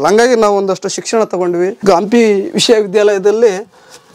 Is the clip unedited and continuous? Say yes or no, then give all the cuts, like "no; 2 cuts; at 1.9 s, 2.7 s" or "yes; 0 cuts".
no; 1 cut; at 1.8 s